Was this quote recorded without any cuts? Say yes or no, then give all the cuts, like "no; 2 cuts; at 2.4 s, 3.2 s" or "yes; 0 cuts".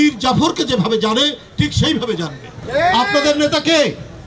no; 1 cut; at 2.5 s